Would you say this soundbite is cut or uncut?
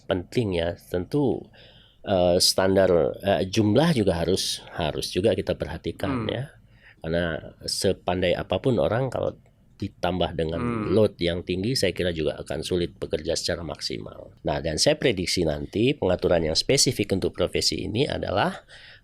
cut